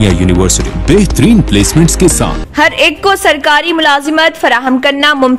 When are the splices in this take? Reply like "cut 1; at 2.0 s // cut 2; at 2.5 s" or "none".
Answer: cut 1; at 2.4 s